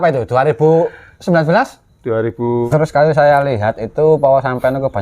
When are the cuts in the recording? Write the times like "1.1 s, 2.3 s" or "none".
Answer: 2.7 s